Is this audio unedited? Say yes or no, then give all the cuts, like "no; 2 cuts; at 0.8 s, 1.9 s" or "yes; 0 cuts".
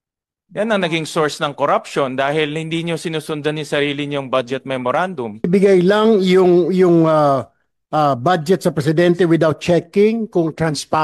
no; 1 cut; at 5.5 s